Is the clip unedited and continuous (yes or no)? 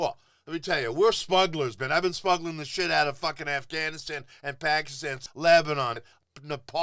no